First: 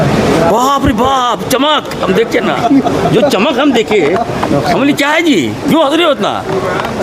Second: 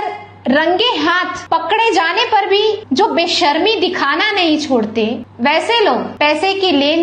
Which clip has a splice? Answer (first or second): second